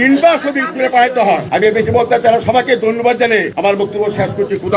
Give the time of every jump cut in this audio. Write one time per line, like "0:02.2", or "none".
0:01.4
0:03.5